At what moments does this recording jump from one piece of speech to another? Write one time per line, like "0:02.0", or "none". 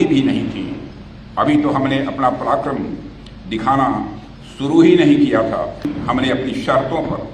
0:05.9

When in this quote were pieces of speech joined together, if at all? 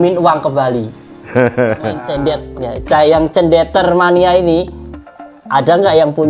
0:02.1

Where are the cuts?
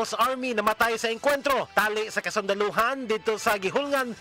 none

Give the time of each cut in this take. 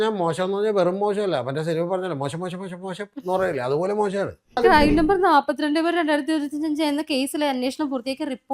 0:04.6

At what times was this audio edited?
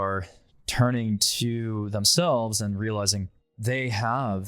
0:03.5

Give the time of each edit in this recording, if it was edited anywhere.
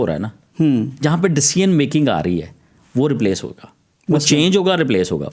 none

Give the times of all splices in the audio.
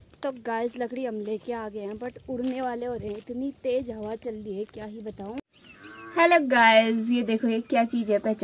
0:05.4

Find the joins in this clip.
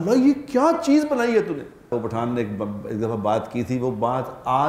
0:01.9

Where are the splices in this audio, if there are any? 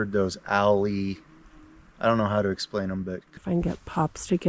0:03.4

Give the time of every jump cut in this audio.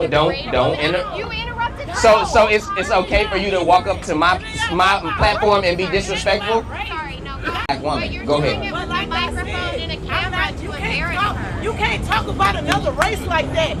none

